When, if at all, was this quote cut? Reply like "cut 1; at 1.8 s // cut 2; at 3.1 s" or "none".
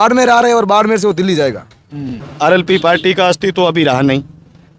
cut 1; at 2.2 s